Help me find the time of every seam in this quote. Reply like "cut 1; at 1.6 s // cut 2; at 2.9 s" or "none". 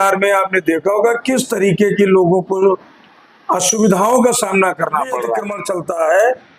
cut 1; at 5.6 s